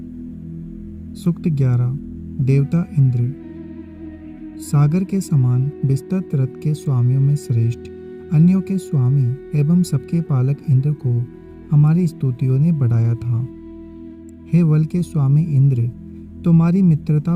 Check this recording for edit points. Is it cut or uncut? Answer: cut